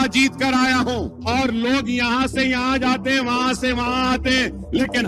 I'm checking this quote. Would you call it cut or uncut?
cut